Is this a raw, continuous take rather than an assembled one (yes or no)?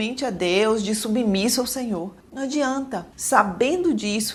yes